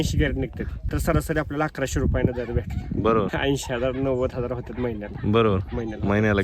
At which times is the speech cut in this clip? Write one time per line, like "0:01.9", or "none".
0:00.9
0:03.3